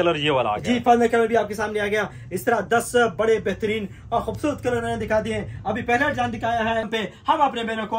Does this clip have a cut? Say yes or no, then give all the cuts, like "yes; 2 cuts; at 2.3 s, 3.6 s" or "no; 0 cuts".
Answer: yes; 1 cut; at 6.9 s